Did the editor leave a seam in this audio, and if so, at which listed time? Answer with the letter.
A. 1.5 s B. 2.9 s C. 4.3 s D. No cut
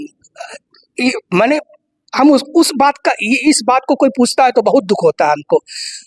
D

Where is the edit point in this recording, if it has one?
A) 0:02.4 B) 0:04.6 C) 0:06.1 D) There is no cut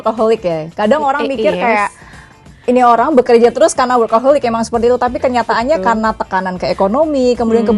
D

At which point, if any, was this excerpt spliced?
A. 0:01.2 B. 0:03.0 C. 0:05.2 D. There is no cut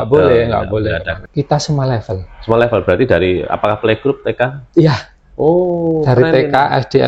A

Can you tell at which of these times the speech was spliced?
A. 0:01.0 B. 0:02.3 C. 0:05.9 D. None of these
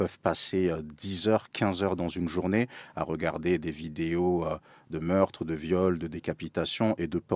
D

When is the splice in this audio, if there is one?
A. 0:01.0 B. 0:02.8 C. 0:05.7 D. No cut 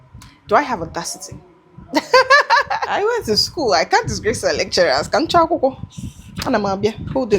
B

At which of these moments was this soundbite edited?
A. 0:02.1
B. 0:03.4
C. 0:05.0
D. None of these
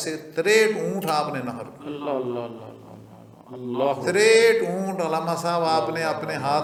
D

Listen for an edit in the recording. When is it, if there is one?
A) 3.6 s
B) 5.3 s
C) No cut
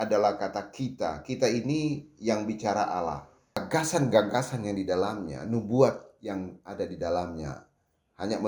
A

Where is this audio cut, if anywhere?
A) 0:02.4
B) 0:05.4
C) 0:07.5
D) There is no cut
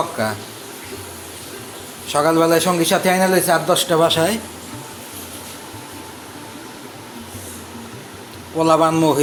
D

